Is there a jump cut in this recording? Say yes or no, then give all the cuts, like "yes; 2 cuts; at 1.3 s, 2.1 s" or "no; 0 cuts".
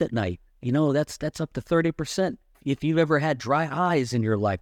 yes; 1 cut; at 2.6 s